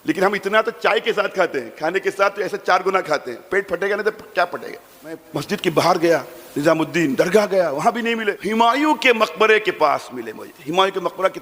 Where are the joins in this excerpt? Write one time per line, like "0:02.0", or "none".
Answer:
0:05.2
0:08.4